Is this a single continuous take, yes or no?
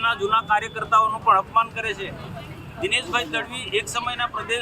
yes